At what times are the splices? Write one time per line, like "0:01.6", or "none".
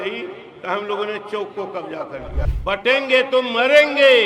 0:02.5